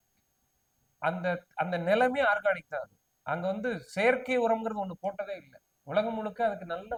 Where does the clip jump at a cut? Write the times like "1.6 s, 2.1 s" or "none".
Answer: none